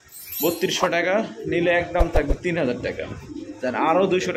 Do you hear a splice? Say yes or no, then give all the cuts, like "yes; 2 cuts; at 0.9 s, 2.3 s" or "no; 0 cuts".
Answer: no; 0 cuts